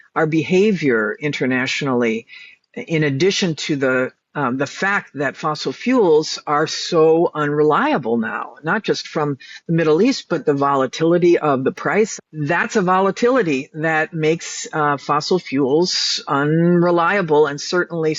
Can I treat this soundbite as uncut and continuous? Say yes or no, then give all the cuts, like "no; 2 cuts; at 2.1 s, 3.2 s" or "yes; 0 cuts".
no; 1 cut; at 12.1 s